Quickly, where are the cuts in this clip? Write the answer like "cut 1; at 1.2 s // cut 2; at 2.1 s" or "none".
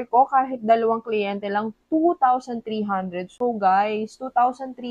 none